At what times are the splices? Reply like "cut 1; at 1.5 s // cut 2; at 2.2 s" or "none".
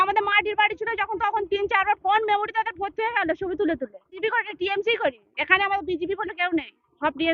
cut 1; at 4.2 s